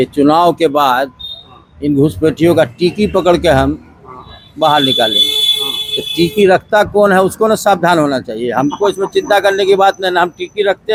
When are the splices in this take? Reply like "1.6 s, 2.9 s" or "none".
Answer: none

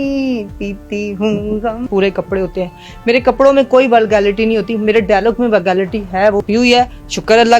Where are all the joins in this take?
1.9 s, 6.4 s

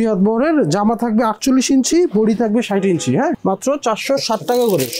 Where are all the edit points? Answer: 3.4 s

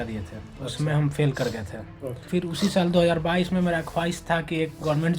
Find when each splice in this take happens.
2.3 s

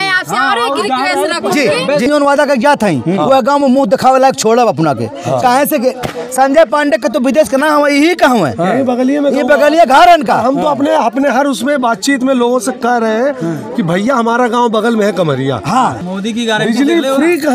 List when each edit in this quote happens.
2.1 s, 16.0 s

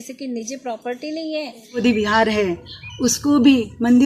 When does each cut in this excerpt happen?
1.8 s

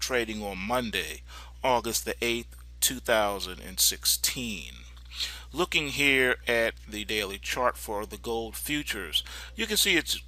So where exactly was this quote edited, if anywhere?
7.9 s

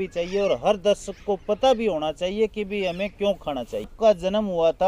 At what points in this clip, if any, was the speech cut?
3.9 s

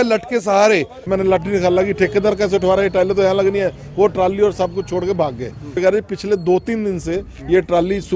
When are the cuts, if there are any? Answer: 1.1 s, 5.8 s

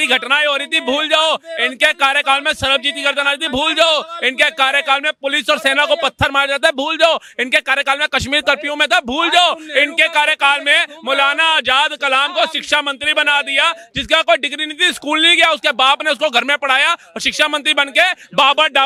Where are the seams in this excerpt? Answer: none

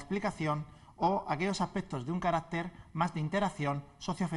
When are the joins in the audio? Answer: 1.5 s

